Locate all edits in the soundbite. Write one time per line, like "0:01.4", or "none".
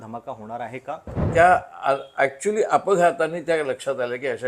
0:01.1

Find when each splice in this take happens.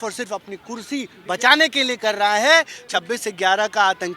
0:02.8

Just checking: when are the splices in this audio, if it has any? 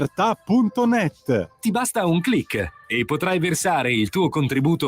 0:01.5

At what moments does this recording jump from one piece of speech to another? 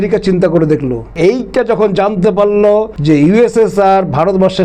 0:01.1
0:02.9

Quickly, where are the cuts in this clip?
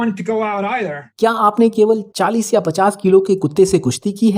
0:01.0

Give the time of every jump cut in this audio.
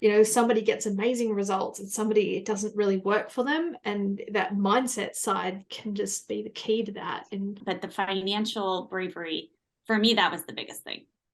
0:07.6

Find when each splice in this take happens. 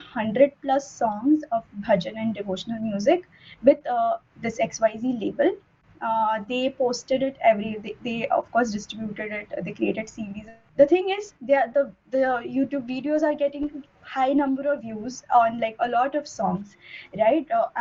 none

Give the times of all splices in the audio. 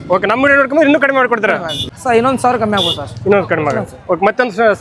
0:01.9

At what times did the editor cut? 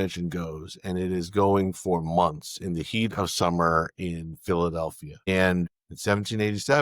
0:05.3
0:05.8

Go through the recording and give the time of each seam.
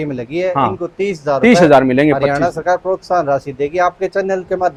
none

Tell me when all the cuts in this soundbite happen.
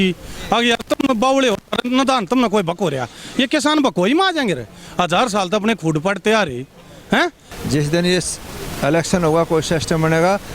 0:07.5

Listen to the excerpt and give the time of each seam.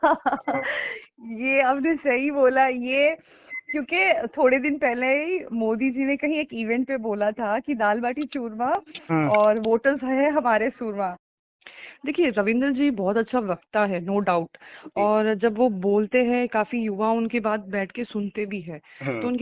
0:11.2

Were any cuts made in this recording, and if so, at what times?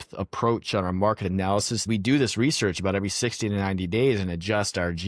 0:01.8

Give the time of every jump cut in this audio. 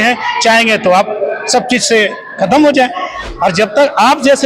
0:03.3

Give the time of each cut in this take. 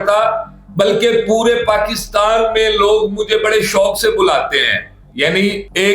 0:05.1

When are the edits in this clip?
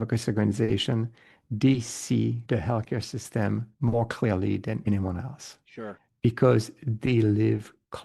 0:02.4
0:04.8

